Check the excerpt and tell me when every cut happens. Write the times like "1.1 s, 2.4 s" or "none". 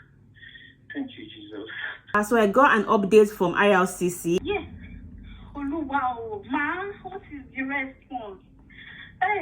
2.1 s, 4.4 s